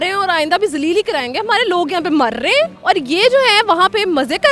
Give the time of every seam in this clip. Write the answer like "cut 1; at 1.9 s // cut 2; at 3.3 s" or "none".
none